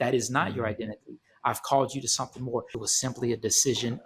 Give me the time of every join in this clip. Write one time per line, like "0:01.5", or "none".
0:02.8